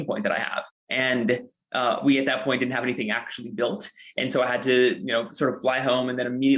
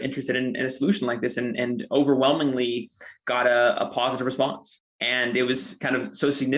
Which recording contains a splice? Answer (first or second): second